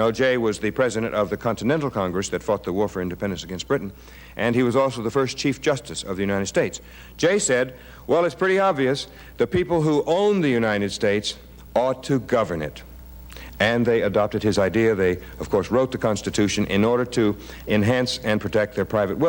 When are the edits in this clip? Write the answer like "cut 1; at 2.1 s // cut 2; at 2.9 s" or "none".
none